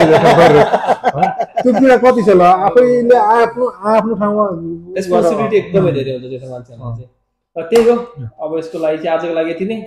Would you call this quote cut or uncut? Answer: uncut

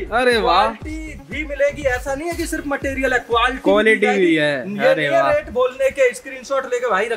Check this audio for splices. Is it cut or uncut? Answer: uncut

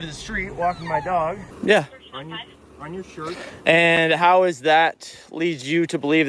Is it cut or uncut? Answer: cut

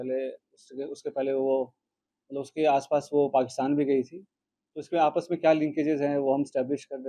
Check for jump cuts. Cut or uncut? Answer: uncut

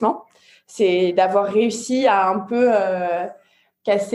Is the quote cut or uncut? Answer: uncut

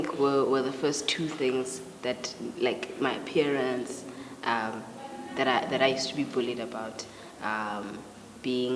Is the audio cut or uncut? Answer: cut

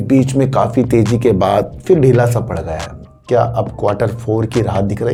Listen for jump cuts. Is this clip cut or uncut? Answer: uncut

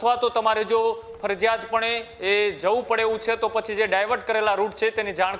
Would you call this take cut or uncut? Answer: uncut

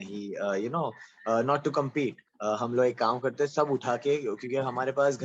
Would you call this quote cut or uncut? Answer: cut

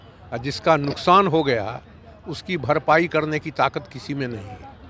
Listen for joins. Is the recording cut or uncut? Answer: uncut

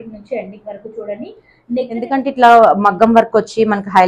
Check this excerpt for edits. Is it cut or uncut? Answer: cut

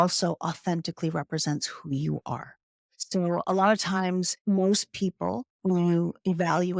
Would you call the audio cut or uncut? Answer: cut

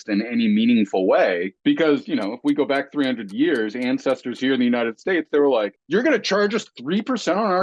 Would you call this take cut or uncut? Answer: cut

